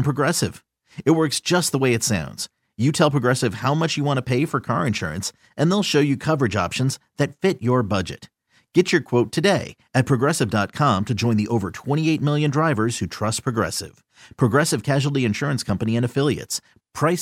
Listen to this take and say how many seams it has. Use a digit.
0